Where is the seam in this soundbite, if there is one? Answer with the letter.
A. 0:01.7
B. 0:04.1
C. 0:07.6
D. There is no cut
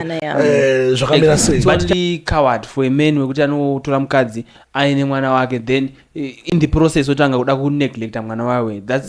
A